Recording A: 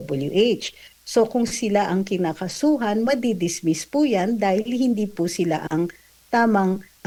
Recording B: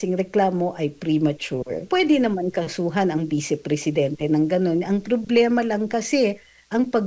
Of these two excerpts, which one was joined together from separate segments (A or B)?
B